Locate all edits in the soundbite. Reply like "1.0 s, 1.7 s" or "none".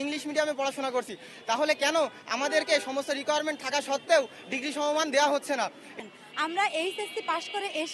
6.0 s